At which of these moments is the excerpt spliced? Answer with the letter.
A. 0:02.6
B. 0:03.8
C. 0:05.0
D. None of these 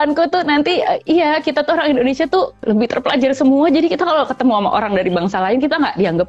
A